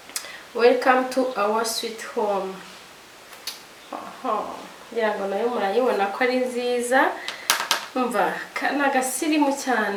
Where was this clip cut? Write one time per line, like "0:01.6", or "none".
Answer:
none